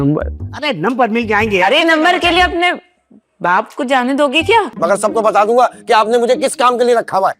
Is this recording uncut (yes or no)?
no